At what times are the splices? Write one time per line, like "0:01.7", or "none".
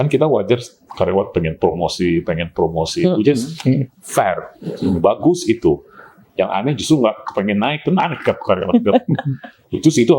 none